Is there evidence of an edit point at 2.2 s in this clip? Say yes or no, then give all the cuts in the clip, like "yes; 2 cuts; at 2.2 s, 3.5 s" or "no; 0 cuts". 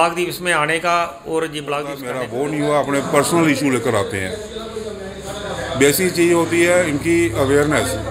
yes; 1 cut; at 2.2 s